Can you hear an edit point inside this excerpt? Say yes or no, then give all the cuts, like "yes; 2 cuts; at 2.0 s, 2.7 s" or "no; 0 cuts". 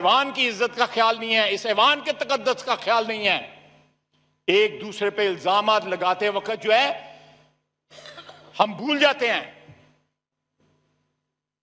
no; 0 cuts